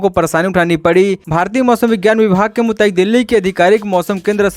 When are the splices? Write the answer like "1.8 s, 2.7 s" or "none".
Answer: 1.2 s